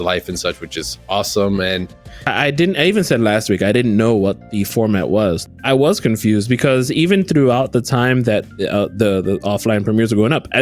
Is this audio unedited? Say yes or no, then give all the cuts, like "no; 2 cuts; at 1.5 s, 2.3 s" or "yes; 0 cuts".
no; 2 cuts; at 2.1 s, 5.4 s